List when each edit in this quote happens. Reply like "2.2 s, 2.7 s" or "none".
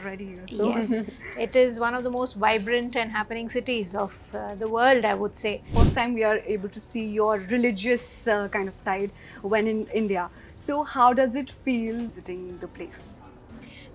5.7 s, 12.2 s